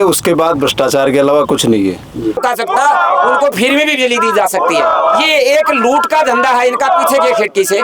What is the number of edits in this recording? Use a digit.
1